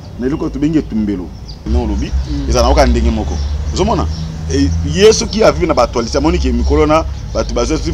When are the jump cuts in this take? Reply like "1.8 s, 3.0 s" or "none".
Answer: 1.7 s